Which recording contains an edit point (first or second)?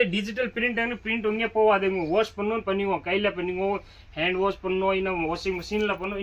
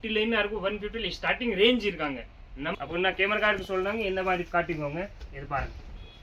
second